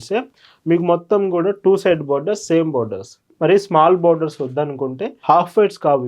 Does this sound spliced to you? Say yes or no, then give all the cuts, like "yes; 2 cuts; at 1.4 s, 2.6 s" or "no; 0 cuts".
yes; 1 cut; at 5.1 s